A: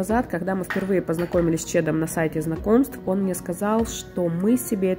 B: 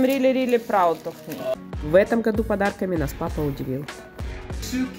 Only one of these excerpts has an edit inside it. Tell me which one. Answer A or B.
B